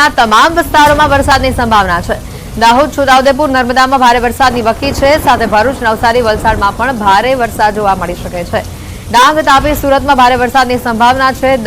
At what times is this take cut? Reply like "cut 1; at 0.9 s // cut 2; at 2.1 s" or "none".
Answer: none